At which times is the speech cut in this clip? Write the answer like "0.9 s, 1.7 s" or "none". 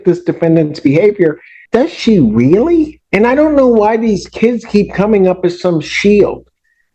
1.5 s, 3.0 s